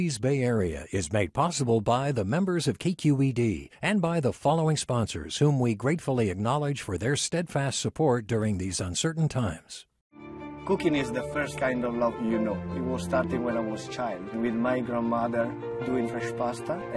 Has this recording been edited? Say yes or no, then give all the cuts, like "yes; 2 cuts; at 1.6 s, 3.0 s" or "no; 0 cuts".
no; 0 cuts